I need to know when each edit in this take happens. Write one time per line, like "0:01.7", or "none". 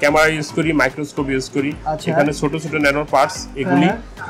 none